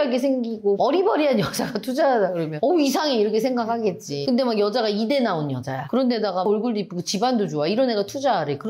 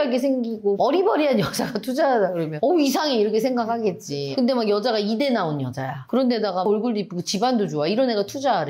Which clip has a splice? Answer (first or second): first